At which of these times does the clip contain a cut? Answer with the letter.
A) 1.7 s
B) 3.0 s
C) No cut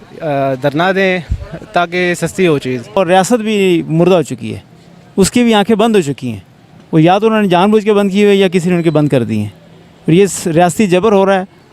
B